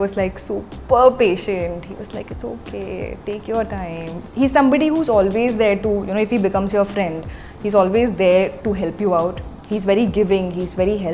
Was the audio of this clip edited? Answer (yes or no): yes